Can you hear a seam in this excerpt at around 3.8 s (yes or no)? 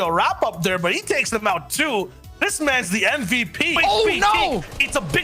yes